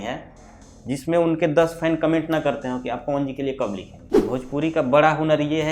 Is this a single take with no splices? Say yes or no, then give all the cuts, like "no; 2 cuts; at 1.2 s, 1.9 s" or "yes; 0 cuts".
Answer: no; 1 cut; at 4.1 s